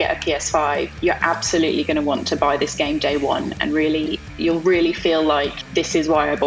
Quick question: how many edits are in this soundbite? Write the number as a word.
two